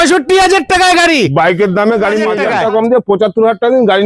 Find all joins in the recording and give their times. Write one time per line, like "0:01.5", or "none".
0:02.4